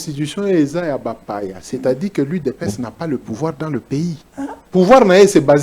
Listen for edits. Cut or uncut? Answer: cut